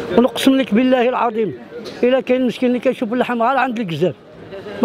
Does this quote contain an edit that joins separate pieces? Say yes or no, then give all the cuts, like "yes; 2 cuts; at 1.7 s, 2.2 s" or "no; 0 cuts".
no; 0 cuts